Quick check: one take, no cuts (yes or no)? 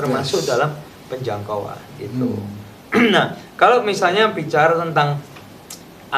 yes